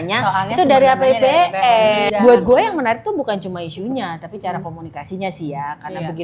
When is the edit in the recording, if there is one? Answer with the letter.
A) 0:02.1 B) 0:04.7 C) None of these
A